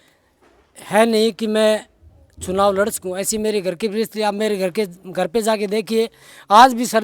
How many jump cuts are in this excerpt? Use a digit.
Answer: 0